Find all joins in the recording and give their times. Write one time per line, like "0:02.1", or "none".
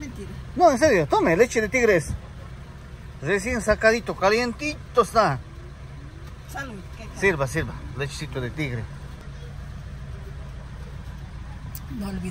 0:09.2